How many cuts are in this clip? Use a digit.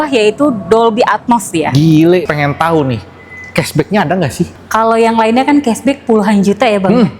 2